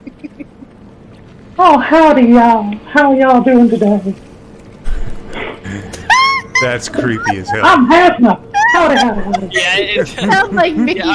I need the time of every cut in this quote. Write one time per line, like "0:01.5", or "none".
0:01.3